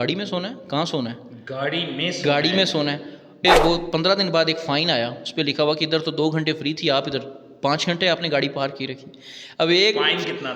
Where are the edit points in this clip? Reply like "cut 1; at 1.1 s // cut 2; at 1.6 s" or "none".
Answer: cut 1; at 3.5 s